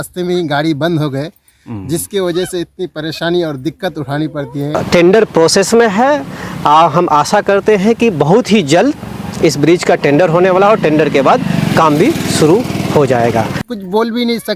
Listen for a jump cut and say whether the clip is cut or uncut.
cut